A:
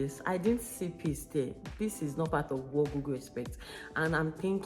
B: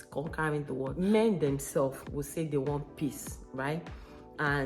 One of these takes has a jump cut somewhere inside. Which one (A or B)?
B